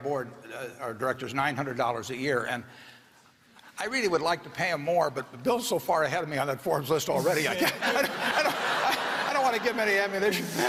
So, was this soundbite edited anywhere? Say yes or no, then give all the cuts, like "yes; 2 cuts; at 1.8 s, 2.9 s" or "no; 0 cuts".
no; 0 cuts